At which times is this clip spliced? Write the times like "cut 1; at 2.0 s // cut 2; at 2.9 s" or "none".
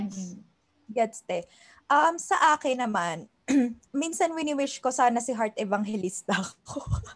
cut 1; at 3.8 s